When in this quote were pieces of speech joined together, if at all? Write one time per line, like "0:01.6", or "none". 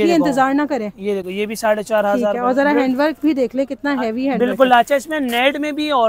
none